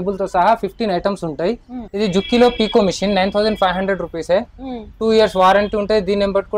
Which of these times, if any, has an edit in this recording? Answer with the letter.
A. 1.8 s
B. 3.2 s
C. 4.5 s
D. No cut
A